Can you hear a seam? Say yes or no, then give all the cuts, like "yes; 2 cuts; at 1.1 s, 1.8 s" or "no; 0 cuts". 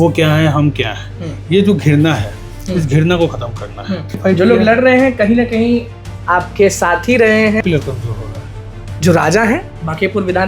yes; 2 cuts; at 4.2 s, 7.6 s